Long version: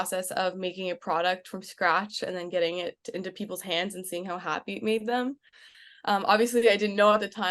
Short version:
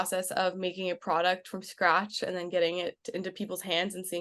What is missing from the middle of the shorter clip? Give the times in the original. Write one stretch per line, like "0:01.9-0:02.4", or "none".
none